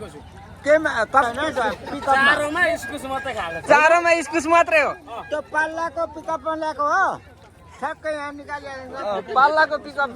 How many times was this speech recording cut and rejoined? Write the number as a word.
one